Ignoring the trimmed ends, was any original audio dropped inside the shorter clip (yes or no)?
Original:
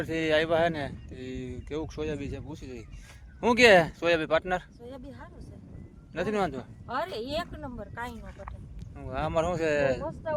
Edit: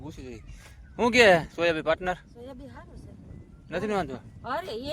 no